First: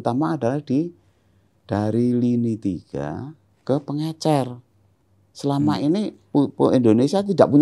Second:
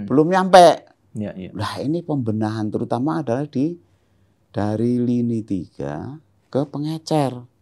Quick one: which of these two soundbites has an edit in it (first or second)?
first